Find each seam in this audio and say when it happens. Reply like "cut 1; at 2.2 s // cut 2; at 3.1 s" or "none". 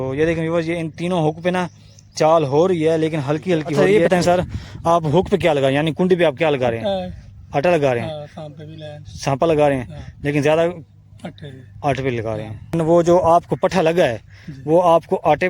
cut 1; at 3.7 s // cut 2; at 12.7 s